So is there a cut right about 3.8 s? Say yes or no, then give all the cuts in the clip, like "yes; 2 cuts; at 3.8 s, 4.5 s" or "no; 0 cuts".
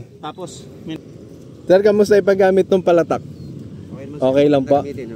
no; 1 cut; at 1.0 s